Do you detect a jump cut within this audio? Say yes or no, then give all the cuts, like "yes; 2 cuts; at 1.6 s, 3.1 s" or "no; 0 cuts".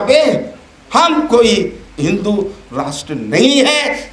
yes; 1 cut; at 1.9 s